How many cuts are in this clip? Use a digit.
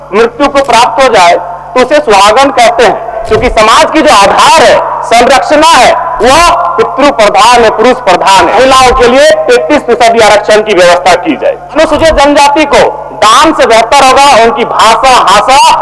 3